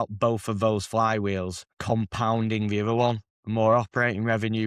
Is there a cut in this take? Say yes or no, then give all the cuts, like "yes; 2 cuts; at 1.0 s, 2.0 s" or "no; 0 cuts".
yes; 2 cuts; at 1.7 s, 3.3 s